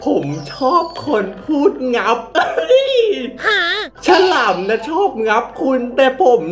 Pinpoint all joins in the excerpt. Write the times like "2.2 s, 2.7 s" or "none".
none